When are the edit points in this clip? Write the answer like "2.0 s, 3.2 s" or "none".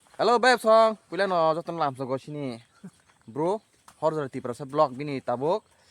3.8 s